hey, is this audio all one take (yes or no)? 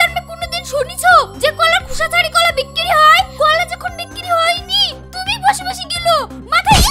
yes